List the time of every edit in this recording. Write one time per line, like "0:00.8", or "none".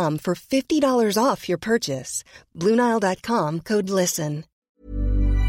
0:04.6